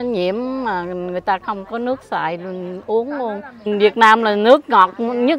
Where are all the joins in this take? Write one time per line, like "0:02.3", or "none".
0:03.7